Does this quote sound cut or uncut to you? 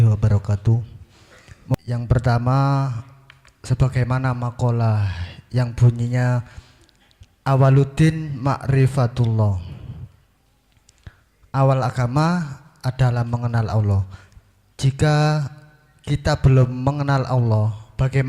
cut